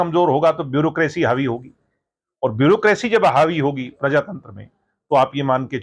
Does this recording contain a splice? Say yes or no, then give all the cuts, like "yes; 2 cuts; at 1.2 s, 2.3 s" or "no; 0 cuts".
no; 0 cuts